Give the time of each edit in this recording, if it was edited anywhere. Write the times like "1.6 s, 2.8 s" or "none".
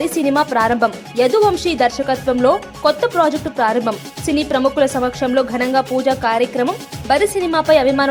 none